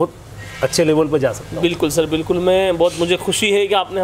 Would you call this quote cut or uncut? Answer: uncut